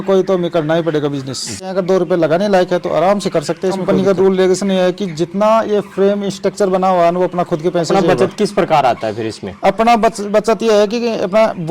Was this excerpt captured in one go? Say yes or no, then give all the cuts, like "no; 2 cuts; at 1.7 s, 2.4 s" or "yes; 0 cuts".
no; 3 cuts; at 1.7 s, 3.8 s, 7.9 s